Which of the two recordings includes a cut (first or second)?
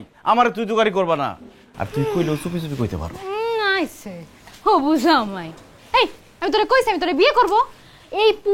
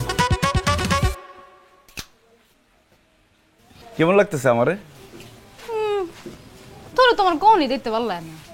second